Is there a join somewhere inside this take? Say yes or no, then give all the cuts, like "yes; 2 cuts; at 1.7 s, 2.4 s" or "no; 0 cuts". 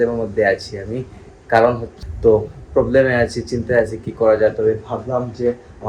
yes; 1 cut; at 1.9 s